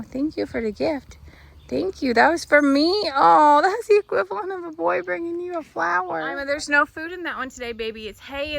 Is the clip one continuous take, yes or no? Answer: no